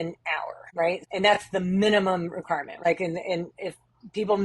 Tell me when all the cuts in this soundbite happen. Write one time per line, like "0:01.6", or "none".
0:01.0
0:02.8